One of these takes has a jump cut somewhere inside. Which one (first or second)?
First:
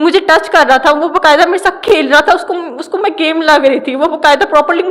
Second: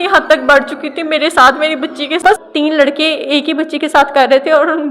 second